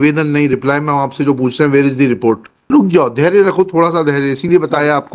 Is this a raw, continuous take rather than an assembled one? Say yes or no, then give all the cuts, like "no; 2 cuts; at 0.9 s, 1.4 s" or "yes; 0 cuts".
no; 1 cut; at 2.6 s